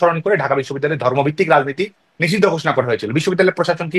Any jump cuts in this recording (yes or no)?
no